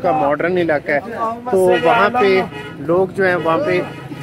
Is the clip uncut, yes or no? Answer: yes